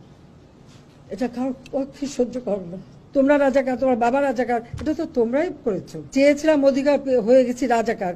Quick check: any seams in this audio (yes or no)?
yes